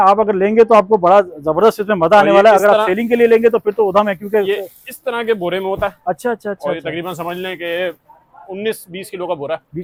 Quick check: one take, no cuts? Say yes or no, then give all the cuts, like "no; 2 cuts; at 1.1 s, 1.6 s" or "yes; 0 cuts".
yes; 0 cuts